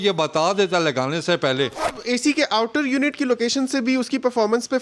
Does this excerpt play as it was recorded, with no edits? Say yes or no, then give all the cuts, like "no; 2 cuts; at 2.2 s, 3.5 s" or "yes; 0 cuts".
no; 1 cut; at 2.0 s